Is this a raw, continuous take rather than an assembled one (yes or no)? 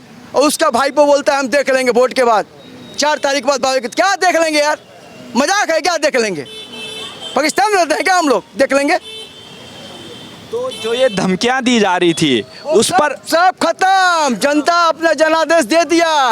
yes